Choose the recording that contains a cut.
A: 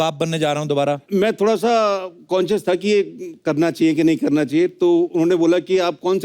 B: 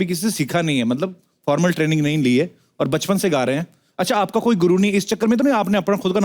A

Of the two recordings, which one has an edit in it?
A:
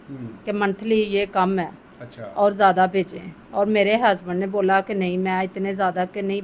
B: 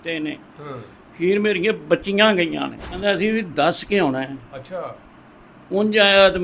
B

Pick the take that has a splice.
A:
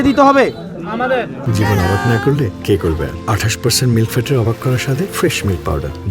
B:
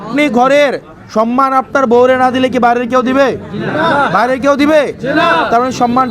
A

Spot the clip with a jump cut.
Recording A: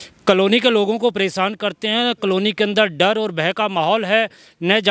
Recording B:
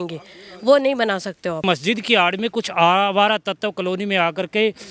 B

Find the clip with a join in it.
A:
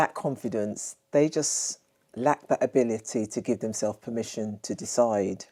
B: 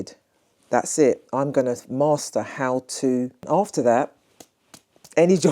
B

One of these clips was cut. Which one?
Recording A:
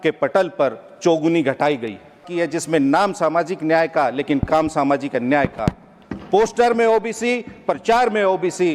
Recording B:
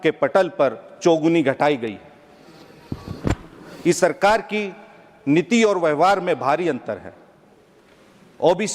A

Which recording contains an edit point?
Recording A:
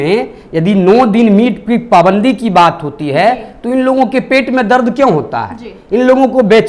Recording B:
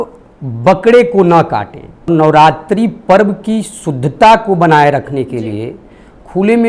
B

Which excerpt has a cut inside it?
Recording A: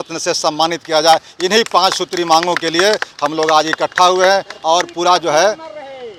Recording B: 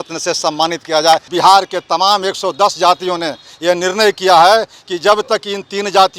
B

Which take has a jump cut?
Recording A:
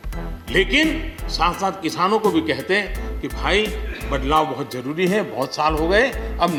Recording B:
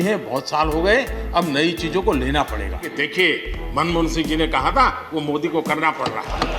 B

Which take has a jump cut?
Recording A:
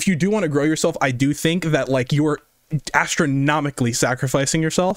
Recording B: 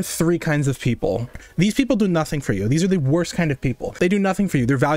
B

